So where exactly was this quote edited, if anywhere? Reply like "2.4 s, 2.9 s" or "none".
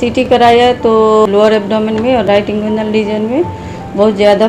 1.3 s